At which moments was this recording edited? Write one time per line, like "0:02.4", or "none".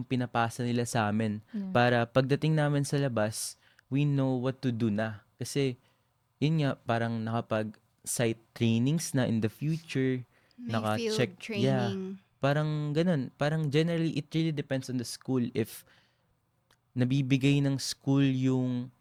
none